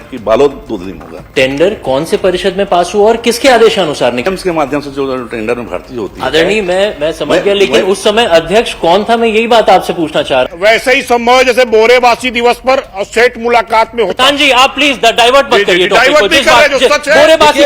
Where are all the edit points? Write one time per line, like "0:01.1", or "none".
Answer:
0:01.2
0:04.3
0:10.5